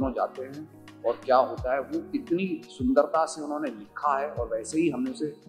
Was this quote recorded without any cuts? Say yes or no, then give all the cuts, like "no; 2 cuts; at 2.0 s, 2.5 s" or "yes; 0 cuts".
yes; 0 cuts